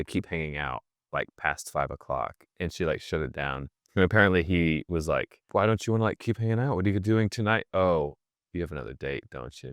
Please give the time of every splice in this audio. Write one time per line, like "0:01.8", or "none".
0:05.4